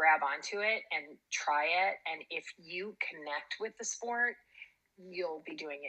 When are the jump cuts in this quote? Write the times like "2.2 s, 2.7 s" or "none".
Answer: none

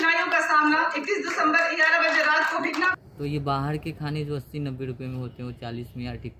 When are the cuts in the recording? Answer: 2.9 s

